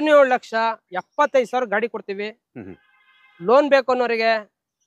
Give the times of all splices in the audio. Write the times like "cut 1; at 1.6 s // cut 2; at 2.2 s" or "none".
none